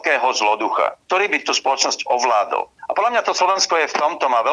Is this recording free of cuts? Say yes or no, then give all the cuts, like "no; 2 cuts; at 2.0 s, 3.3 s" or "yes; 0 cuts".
yes; 0 cuts